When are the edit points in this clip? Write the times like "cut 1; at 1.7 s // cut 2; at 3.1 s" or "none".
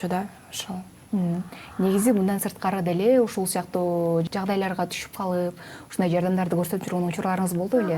none